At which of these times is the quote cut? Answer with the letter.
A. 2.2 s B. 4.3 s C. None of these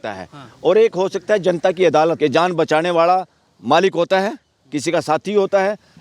A